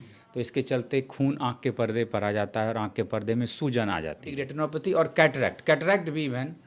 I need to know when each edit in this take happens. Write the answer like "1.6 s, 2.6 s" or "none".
4.4 s